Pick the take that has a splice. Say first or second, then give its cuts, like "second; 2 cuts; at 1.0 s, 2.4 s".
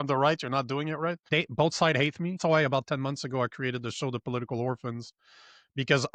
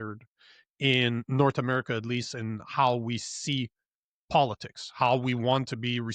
first; 2 cuts; at 1.2 s, 2.4 s